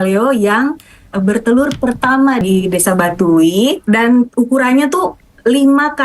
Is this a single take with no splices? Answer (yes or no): no